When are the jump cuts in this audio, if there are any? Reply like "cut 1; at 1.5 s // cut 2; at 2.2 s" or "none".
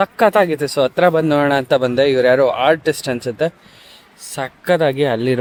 none